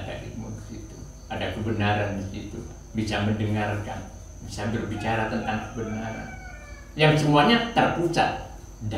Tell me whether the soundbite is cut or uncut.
uncut